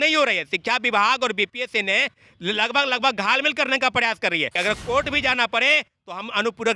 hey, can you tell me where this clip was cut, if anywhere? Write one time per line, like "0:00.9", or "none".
0:04.6